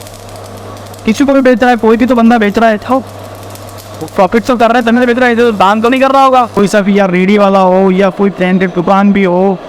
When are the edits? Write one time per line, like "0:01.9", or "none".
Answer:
0:06.6